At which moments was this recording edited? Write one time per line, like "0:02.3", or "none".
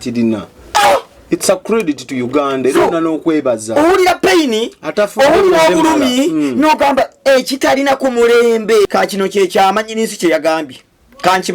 0:08.9